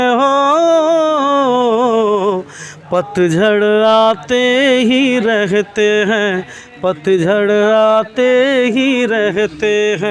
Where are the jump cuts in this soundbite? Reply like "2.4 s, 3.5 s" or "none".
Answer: none